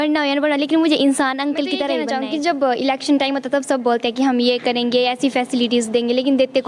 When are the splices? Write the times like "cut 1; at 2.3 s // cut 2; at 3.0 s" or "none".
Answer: cut 1; at 2.0 s